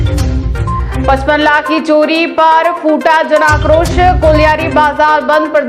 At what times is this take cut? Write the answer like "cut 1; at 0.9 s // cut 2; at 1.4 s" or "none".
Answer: cut 1; at 0.9 s